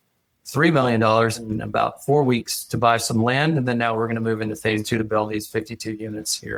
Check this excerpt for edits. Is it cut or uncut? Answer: uncut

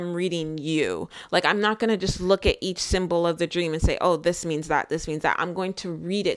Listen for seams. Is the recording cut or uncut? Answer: uncut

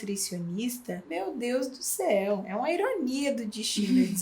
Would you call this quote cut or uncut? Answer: cut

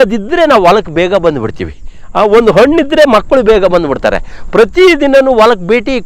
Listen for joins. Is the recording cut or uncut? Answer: uncut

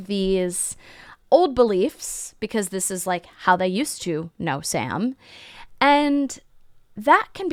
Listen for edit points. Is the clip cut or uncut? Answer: uncut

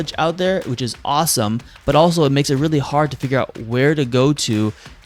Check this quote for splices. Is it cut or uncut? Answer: uncut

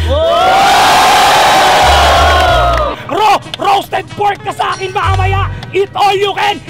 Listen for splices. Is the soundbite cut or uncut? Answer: cut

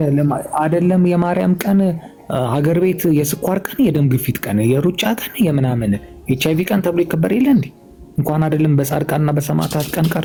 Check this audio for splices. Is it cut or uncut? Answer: uncut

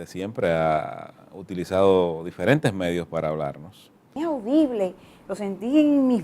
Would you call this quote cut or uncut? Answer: cut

